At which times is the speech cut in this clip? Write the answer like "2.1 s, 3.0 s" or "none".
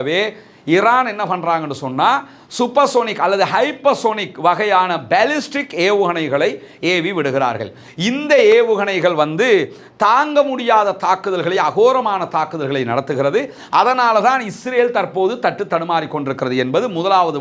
none

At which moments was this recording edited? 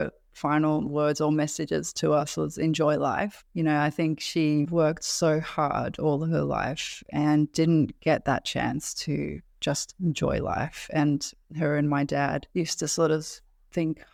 none

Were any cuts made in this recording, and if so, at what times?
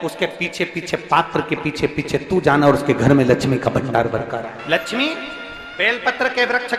4.6 s

